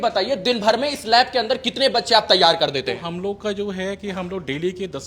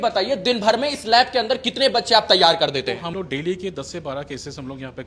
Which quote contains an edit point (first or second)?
second